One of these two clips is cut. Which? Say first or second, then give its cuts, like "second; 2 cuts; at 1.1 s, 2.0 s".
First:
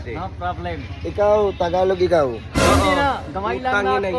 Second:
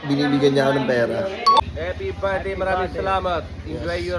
second; 1 cut; at 1.6 s